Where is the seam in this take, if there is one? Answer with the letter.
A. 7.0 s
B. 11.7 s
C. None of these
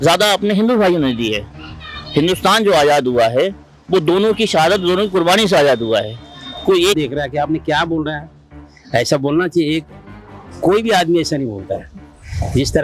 A